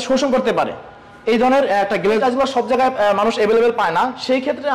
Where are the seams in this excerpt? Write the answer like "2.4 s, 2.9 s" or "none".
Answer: 2.2 s